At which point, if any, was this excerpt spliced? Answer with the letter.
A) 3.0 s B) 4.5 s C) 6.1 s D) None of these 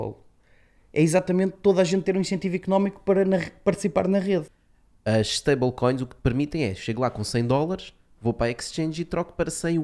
B